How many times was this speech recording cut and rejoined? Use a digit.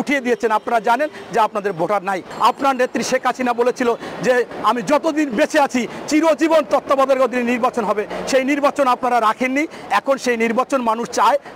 1